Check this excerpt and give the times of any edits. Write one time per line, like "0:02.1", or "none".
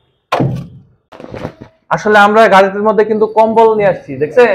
0:01.3